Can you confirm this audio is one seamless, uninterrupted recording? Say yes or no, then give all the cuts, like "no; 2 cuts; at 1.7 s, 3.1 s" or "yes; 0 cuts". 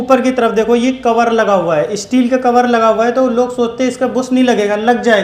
yes; 0 cuts